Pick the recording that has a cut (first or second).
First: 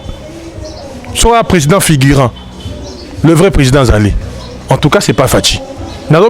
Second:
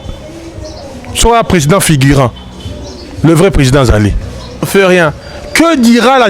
second